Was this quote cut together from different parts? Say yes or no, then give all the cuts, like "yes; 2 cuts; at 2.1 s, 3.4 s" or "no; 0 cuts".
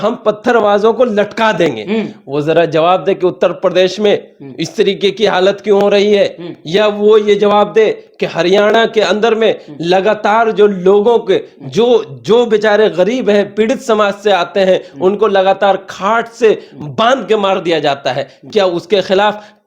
no; 0 cuts